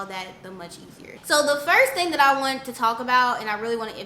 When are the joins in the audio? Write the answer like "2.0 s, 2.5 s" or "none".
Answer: none

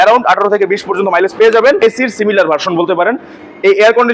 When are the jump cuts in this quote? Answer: 1.8 s

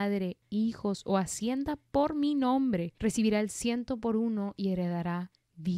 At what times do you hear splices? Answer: 2.9 s

